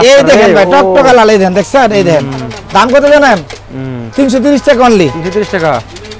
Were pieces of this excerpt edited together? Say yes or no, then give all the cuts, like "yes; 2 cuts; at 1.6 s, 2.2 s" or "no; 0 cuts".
no; 0 cuts